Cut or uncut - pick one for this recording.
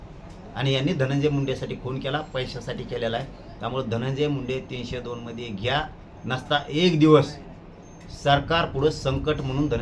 uncut